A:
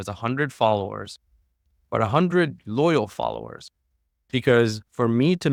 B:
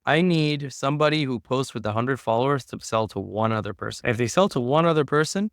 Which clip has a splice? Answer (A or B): B